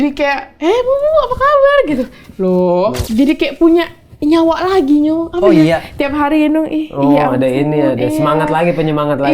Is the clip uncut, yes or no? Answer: no